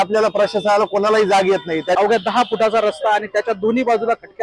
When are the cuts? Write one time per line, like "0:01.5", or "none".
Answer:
0:02.0